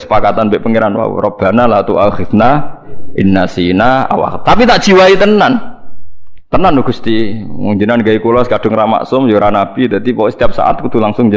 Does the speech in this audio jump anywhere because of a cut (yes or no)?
no